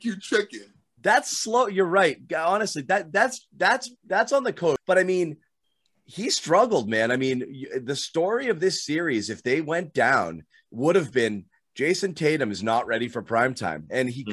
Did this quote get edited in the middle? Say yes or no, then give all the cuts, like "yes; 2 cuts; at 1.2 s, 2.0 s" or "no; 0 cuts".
yes; 1 cut; at 4.8 s